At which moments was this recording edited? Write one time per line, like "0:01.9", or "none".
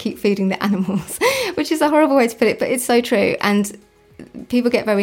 none